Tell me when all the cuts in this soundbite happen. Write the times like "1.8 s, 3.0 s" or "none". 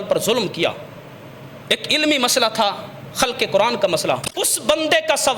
4.3 s